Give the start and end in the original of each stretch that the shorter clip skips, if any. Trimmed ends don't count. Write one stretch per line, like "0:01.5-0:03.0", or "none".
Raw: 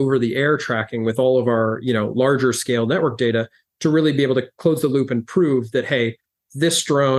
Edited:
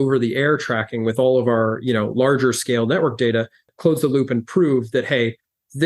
0:03.7-0:04.5